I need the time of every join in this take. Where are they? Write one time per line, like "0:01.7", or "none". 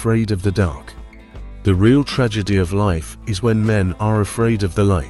none